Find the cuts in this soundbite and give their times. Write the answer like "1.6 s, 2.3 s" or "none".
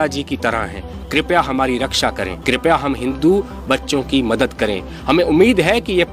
2.3 s